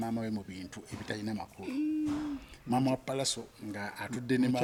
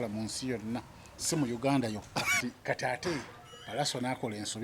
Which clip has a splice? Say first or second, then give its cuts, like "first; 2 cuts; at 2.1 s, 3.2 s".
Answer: second; 1 cut; at 2.4 s